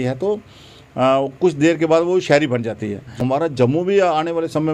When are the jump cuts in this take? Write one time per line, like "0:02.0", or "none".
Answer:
0:03.1